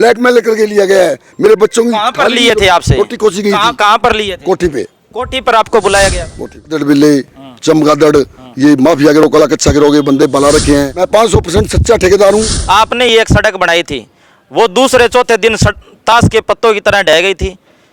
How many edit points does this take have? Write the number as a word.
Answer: three